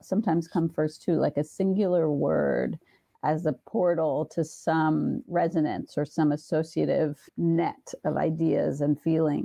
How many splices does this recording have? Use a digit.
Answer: 0